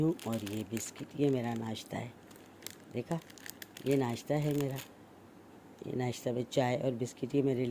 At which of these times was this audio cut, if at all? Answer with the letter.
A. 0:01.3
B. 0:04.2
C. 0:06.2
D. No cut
D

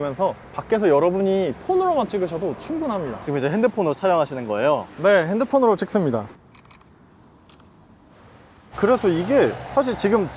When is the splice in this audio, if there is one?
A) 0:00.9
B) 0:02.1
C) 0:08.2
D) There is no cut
D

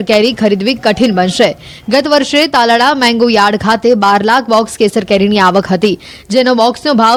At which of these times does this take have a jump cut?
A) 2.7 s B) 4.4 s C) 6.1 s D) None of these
D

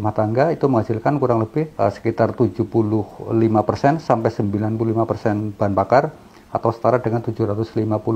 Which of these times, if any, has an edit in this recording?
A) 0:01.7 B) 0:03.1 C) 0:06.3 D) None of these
A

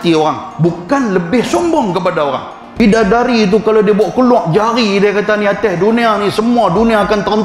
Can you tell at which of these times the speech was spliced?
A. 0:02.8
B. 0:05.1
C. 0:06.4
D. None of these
A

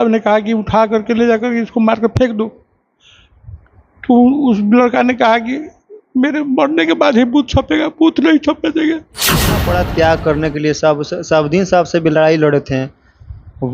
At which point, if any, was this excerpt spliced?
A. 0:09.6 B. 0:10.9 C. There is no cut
A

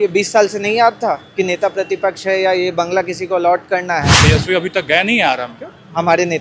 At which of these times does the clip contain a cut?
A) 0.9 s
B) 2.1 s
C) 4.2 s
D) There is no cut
C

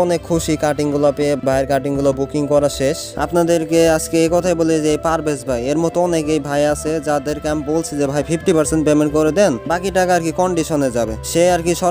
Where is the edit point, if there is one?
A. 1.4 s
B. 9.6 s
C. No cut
A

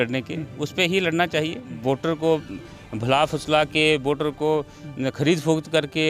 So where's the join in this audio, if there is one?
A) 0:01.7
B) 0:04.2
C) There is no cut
A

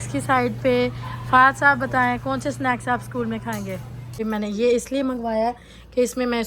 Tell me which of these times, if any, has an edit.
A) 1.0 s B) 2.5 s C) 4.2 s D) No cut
C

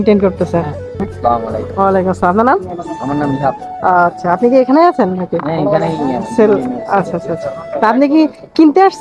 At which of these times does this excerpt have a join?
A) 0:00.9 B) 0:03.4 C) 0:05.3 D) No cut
A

